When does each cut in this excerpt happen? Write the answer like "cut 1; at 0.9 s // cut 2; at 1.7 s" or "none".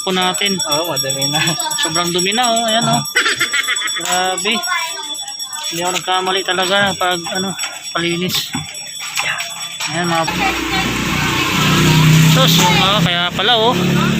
cut 1; at 10.3 s